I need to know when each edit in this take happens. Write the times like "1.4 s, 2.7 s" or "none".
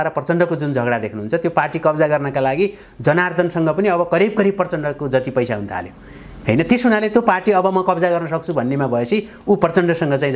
none